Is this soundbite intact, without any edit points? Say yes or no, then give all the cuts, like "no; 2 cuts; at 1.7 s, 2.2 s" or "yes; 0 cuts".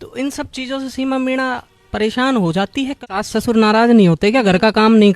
no; 1 cut; at 2.9 s